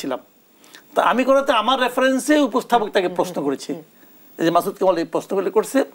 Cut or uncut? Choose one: uncut